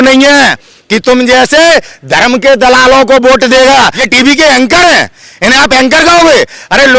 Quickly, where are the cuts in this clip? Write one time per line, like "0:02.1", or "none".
0:04.0